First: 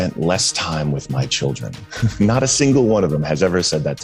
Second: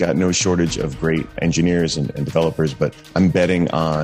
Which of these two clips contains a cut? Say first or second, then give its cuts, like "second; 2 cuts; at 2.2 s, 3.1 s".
second; 2 cuts; at 1.3 s, 3.0 s